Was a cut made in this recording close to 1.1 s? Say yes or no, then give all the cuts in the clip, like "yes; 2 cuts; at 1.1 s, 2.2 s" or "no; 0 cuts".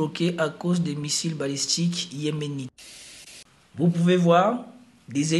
no; 1 cut; at 3.0 s